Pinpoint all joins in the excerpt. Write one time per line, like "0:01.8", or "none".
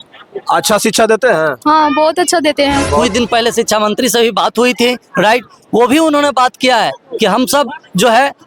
0:03.0